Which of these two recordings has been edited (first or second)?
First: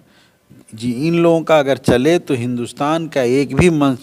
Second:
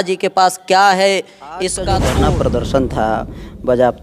second